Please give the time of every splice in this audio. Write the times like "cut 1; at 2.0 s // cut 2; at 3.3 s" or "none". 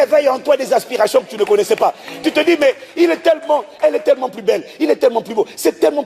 none